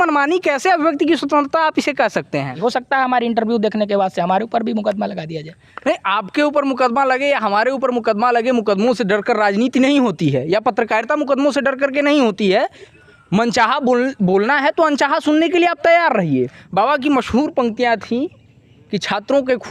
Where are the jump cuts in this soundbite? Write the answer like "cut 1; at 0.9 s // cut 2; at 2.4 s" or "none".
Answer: cut 1; at 2.5 s // cut 2; at 12.9 s // cut 3; at 16.6 s